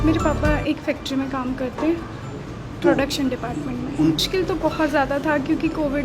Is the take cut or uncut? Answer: cut